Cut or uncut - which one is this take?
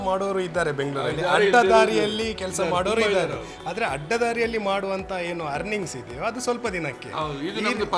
uncut